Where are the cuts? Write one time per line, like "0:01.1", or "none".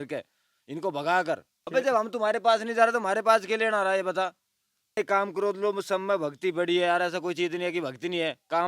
0:01.5
0:05.0